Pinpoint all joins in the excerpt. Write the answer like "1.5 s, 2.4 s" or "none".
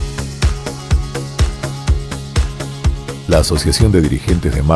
2.8 s